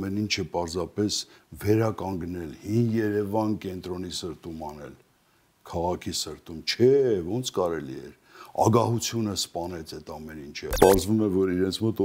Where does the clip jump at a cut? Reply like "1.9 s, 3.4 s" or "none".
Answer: 10.7 s